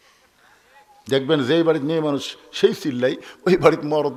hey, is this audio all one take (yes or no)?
yes